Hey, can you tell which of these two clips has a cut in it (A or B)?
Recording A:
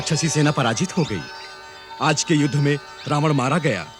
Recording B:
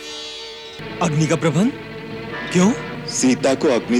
B